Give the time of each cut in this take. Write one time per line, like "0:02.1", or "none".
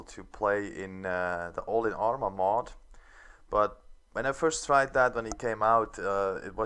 0:04.0